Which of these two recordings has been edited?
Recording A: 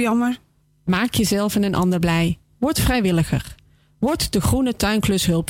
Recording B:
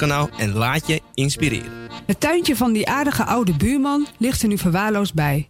B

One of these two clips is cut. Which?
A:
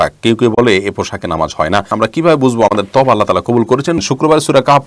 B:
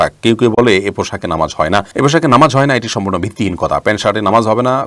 A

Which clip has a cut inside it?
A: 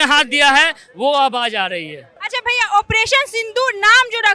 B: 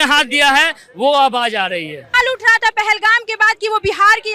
B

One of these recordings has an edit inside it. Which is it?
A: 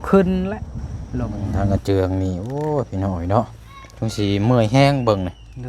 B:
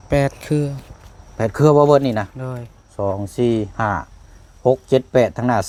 A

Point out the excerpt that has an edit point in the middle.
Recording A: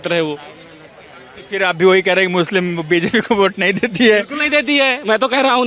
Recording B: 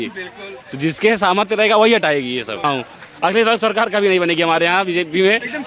B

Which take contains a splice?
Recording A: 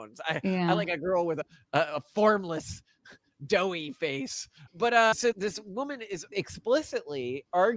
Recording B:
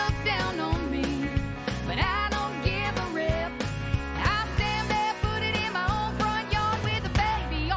A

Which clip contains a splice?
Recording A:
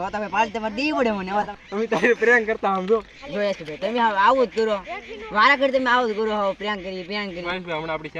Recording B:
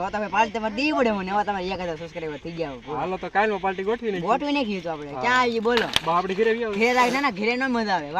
A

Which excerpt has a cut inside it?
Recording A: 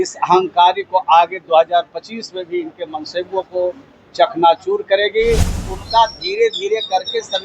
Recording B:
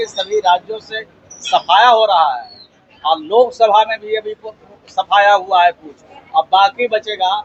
A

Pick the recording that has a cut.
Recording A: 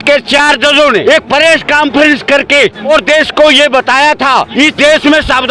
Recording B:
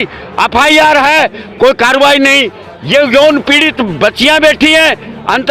A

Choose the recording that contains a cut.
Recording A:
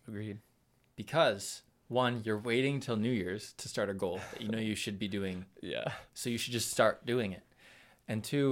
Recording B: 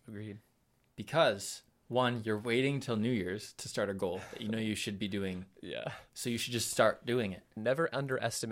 B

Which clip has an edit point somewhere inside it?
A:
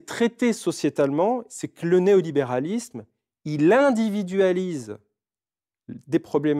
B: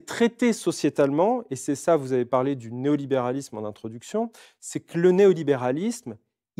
A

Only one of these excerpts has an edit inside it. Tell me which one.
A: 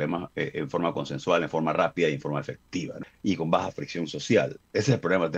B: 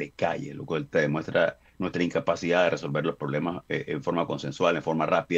A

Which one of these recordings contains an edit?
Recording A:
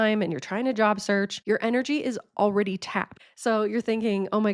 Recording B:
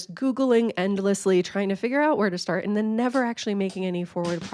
A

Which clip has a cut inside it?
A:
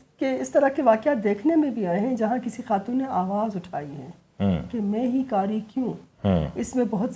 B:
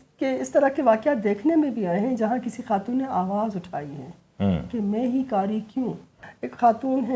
B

